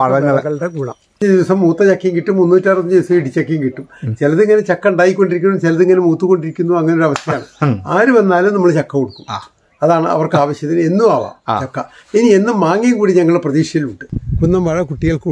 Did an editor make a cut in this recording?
yes; 2 cuts; at 1.2 s, 14.0 s

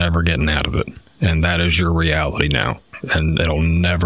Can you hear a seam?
no; 0 cuts

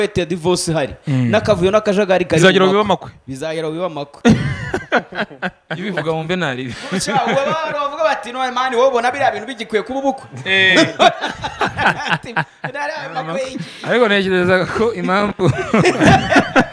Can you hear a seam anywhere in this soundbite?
no; 0 cuts

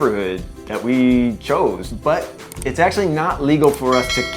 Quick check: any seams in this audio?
yes; 1 cut; at 1.9 s

